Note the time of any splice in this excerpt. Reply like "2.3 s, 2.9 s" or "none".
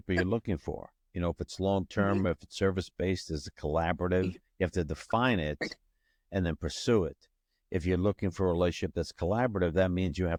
none

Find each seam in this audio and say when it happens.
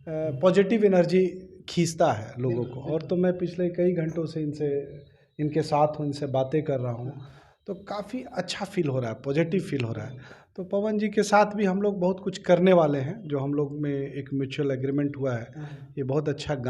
none

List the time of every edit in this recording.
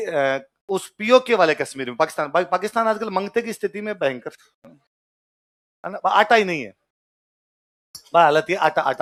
none

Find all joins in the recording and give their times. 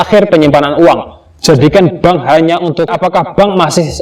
2.9 s

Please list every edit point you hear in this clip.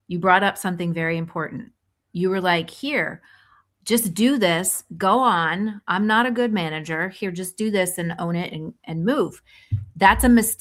none

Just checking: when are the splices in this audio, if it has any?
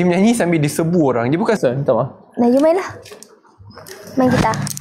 1.6 s

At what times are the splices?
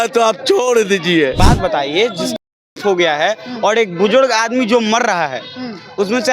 1.3 s

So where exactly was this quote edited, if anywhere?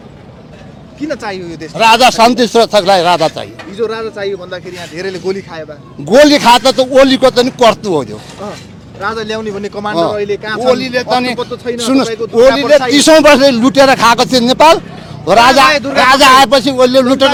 none

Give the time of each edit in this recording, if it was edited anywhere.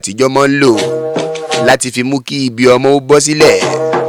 none

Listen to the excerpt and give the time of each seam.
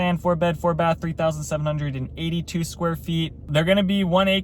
3.4 s

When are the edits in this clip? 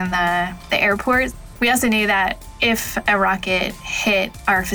1.4 s, 2.5 s

